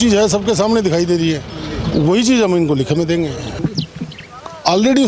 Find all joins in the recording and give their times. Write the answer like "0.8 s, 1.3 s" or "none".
3.6 s